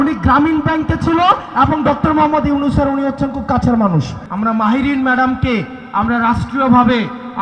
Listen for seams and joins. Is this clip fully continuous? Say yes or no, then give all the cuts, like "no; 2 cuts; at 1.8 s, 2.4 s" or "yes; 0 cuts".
no; 1 cut; at 4.2 s